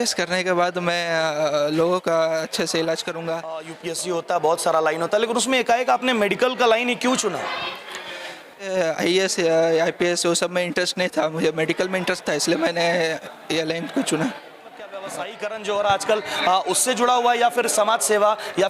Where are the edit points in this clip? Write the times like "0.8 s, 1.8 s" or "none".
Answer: 3.8 s, 8.7 s, 15.0 s

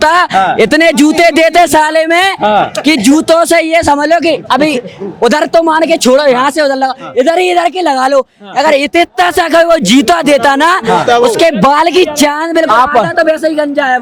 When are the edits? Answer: none

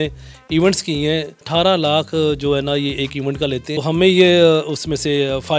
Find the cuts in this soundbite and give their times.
1.4 s, 3.7 s

